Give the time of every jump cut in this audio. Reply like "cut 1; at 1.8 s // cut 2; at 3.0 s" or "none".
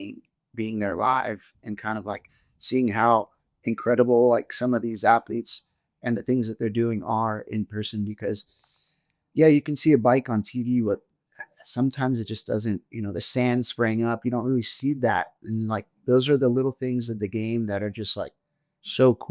none